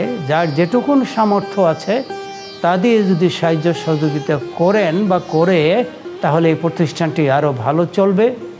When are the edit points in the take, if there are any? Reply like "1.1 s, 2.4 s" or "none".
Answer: 6.0 s